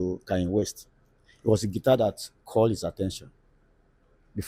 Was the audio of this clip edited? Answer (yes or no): no